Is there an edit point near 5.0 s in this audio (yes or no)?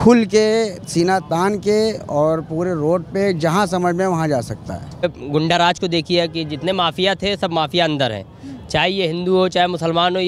yes